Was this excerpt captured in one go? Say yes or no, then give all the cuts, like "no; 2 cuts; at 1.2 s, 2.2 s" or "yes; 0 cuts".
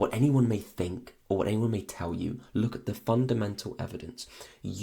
yes; 0 cuts